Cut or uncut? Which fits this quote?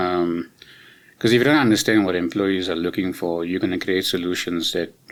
uncut